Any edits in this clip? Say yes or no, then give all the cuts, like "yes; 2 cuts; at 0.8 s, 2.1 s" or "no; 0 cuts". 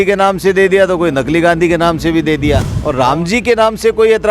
yes; 1 cut; at 2.8 s